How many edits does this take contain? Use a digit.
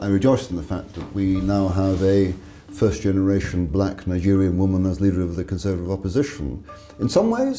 0